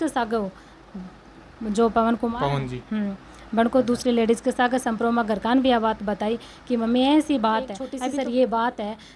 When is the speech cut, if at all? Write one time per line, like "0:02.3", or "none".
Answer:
0:07.8

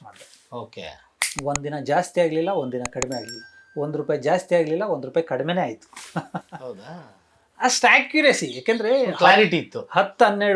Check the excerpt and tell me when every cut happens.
none

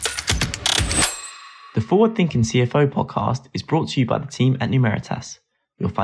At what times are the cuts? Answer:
0:01.5

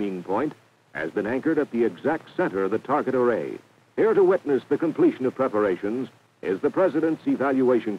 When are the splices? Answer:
0:04.5

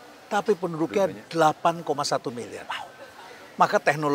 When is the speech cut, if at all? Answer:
none

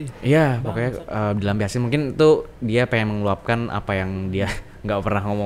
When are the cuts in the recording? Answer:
none

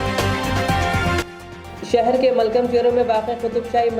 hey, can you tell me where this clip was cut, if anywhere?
0:01.0

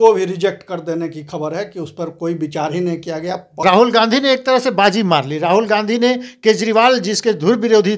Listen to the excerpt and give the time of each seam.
0:03.6

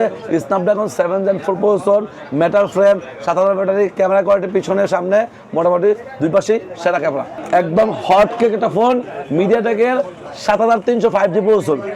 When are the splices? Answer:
0:07.3

